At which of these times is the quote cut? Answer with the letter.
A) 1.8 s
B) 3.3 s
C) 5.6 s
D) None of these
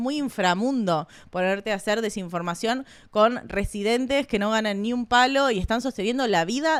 D